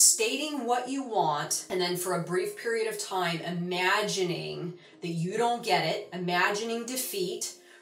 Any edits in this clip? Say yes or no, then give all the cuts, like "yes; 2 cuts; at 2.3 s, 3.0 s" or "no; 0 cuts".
yes; 1 cut; at 1.5 s